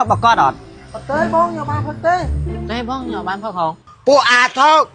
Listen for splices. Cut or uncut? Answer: cut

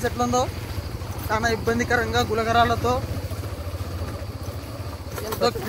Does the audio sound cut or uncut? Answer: uncut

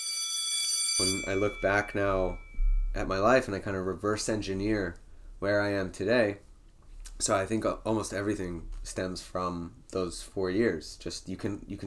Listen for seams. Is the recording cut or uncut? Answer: cut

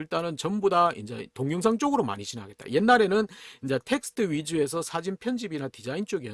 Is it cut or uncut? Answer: uncut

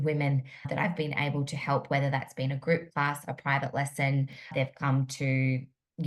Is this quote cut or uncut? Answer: uncut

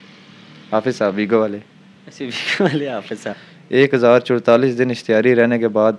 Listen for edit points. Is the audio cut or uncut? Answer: cut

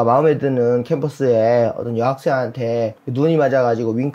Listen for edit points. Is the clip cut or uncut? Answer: cut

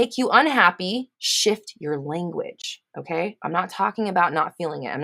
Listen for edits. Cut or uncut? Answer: cut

